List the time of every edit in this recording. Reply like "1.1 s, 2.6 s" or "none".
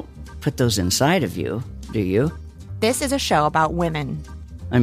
none